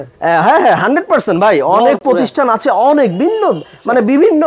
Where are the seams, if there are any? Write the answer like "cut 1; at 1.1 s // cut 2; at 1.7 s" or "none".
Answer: none